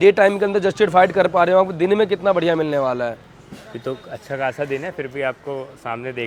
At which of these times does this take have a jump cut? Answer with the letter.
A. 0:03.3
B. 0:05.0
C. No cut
C